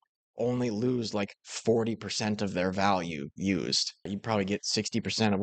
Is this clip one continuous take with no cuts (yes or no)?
no